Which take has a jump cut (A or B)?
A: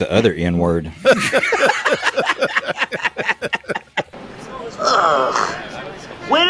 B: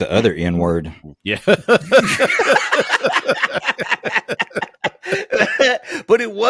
A